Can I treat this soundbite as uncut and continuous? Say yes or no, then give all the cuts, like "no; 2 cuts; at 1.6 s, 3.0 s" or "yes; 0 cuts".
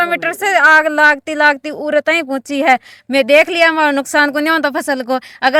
yes; 0 cuts